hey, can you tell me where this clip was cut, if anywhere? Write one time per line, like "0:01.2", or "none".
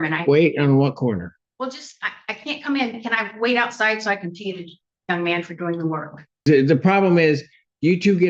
0:06.4